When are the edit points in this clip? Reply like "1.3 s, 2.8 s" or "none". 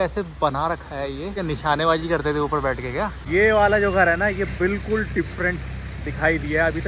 1.4 s, 3.2 s